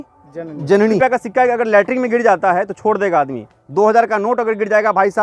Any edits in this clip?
yes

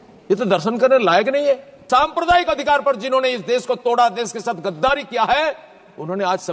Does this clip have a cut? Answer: yes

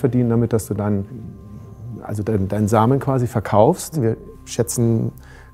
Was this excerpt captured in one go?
no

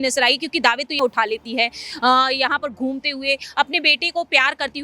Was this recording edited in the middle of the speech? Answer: yes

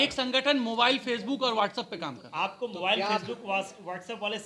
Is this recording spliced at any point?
no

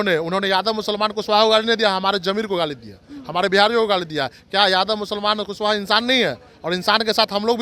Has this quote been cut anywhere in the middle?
no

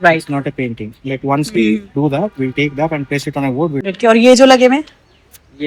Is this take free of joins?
no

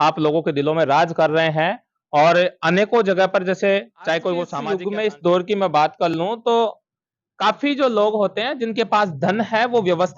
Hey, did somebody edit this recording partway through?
yes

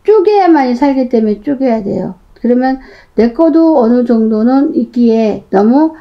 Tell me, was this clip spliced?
no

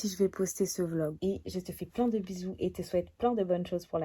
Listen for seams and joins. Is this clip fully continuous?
no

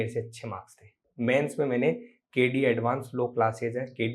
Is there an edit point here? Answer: yes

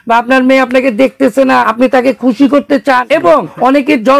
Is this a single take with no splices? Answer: no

